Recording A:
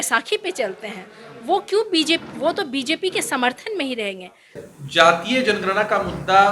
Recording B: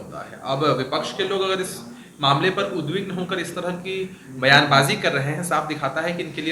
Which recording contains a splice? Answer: A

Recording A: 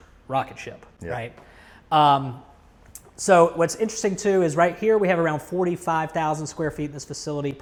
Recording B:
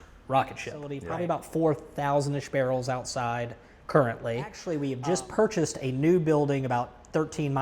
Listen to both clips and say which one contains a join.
B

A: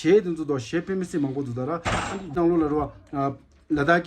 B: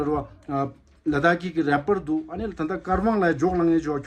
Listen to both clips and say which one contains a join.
A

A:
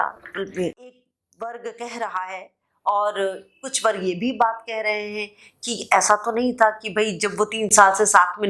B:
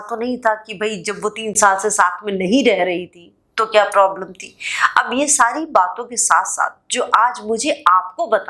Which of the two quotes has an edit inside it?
A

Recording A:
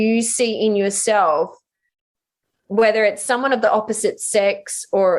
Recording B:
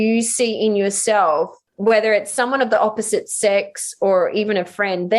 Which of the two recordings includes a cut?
B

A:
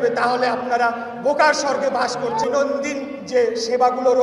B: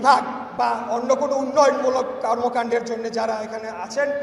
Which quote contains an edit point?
A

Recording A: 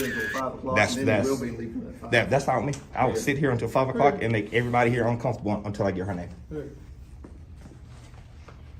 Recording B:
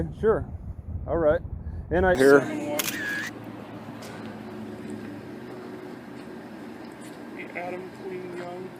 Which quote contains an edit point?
B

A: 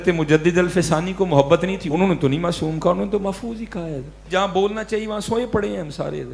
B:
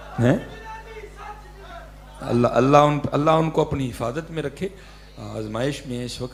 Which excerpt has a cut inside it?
A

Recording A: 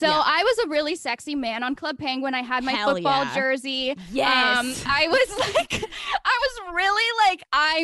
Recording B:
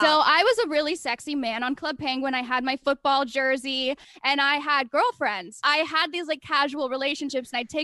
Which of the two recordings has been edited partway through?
B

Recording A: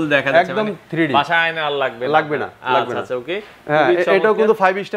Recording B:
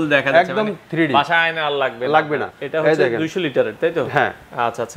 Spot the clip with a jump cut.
B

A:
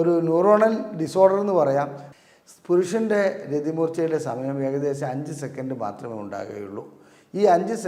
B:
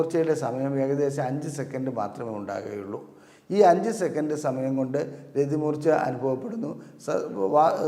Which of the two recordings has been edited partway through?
A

